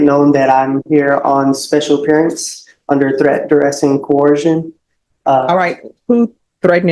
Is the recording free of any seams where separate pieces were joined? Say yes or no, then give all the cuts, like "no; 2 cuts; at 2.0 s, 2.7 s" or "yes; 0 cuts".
yes; 0 cuts